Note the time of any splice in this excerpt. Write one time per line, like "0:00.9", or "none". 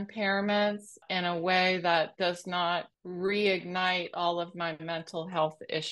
0:01.0
0:03.0

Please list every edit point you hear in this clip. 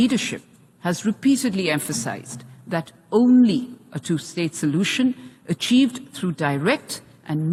none

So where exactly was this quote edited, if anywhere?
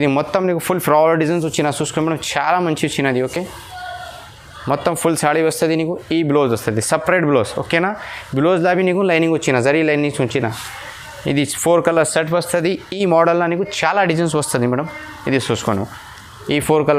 none

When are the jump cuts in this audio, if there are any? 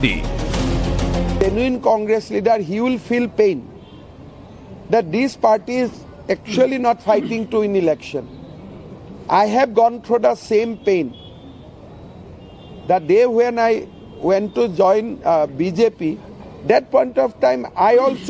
0:14.9

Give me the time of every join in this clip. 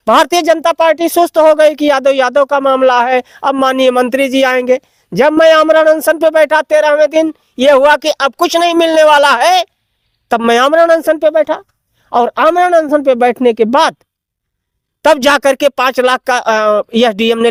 none

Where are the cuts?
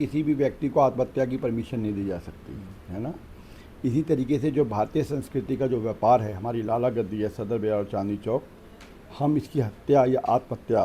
none

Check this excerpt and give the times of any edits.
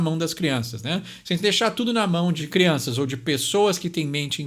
0:02.4

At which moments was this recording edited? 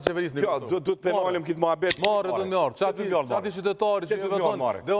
0:02.0

